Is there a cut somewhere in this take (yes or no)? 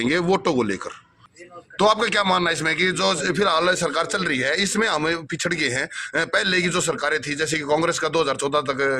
yes